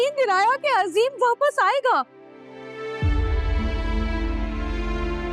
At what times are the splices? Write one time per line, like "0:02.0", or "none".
none